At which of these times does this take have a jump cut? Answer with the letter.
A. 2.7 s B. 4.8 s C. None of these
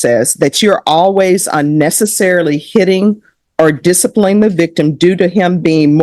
C